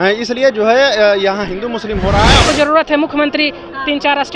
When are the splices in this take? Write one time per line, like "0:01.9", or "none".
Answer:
0:02.4